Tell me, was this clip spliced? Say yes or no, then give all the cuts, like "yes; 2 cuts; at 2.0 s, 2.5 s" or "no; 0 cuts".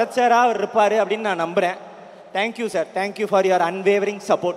no; 0 cuts